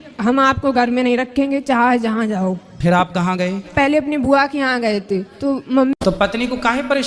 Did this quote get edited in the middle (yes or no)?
yes